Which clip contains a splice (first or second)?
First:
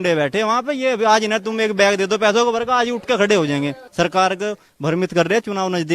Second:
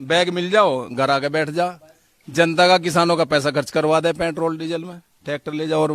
first